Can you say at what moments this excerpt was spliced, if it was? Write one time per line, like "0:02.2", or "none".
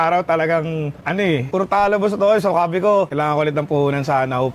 0:01.3
0:03.1